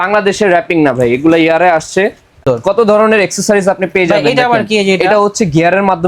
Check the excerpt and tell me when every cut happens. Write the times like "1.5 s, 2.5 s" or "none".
2.4 s

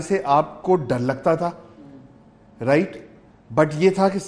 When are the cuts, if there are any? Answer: none

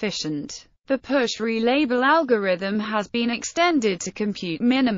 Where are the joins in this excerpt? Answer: 2.8 s

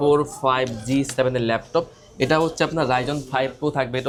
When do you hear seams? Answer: none

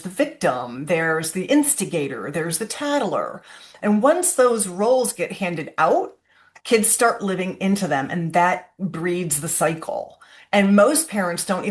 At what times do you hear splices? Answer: none

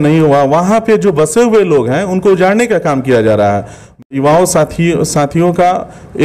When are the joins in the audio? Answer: 4.0 s

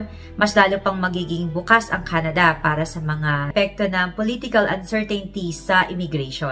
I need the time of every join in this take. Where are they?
3.4 s

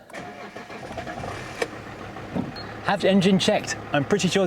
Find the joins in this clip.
2.7 s

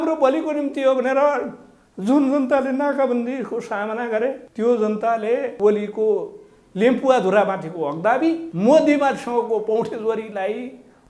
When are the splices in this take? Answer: 4.5 s, 5.5 s, 8.5 s

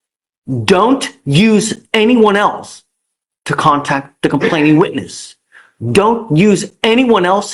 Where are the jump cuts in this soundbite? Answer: none

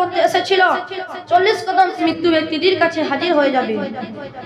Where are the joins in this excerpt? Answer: 2.0 s

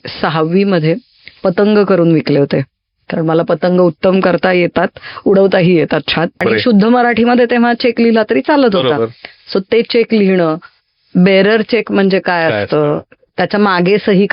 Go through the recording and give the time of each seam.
6.4 s

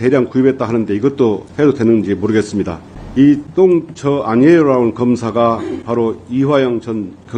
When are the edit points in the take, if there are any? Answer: 1.5 s, 3.2 s

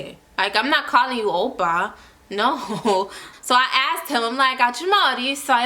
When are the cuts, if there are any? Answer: 3.2 s

